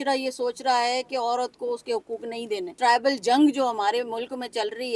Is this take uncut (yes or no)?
no